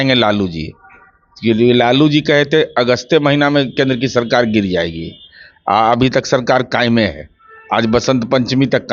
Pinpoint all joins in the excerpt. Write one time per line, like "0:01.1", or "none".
none